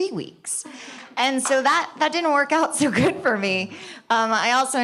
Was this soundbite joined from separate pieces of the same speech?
no; 0 cuts

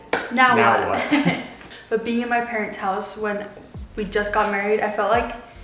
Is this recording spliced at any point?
yes; 1 cut; at 1.6 s

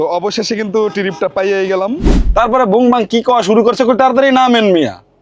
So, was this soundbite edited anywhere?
yes; 1 cut; at 2.1 s

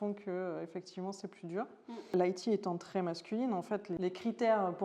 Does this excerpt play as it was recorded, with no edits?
no; 2 cuts; at 2.1 s, 3.9 s

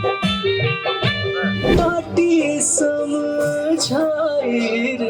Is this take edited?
yes; 1 cut; at 1.7 s

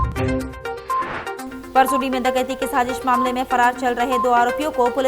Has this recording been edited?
no; 0 cuts

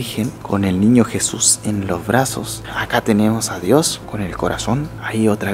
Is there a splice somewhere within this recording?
no; 0 cuts

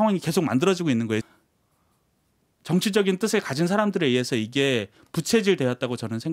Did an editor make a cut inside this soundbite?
yes; 1 cut; at 1.3 s

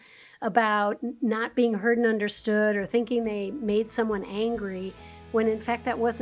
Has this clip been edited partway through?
no; 0 cuts

